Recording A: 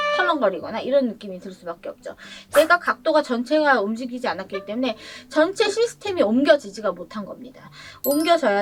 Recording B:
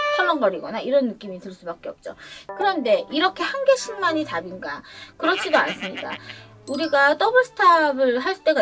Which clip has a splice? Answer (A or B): B